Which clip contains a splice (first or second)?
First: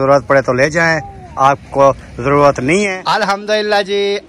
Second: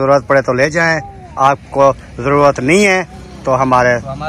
first